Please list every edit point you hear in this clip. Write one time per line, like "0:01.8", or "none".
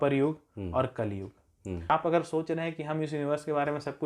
0:01.9